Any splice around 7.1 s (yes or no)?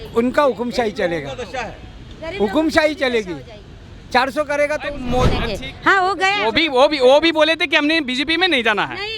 no